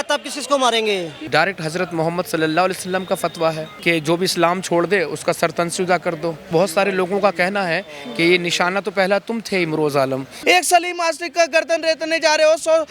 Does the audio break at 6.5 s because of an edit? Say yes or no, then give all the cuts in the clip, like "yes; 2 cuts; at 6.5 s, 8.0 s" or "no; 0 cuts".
yes; 3 cuts; at 1.2 s, 6.5 s, 10.3 s